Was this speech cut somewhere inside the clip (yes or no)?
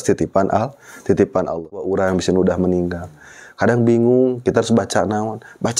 yes